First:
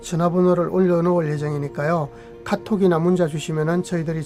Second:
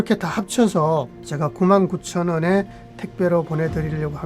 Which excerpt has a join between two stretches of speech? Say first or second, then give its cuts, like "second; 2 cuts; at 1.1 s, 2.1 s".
second; 1 cut; at 1.2 s